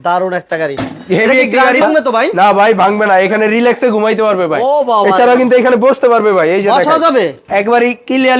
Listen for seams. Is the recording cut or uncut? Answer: cut